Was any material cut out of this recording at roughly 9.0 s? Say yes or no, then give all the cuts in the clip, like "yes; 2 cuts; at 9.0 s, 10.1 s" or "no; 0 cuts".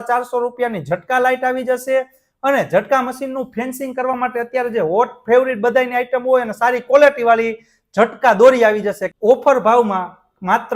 yes; 1 cut; at 9.0 s